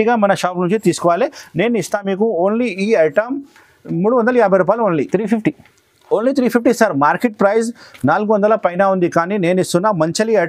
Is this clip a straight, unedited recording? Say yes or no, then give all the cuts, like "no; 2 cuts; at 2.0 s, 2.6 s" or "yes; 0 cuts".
yes; 0 cuts